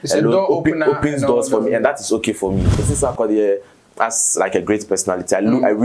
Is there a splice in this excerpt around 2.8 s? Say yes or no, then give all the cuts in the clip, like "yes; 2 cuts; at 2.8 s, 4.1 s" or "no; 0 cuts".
yes; 1 cut; at 2.8 s